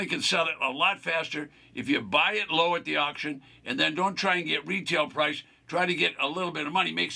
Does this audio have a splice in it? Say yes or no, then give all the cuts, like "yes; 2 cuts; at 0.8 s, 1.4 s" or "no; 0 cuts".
no; 0 cuts